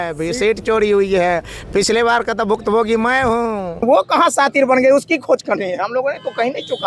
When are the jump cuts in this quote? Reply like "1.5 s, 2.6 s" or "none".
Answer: 3.7 s